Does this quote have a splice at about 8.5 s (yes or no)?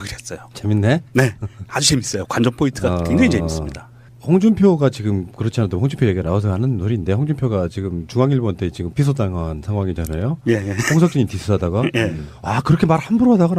no